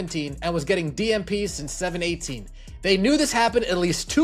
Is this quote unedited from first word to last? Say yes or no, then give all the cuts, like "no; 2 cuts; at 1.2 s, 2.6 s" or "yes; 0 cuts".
yes; 0 cuts